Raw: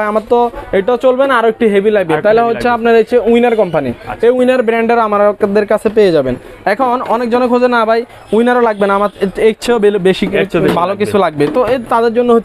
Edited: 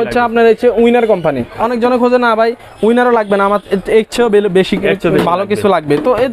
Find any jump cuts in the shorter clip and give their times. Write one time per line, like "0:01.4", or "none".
0:01.6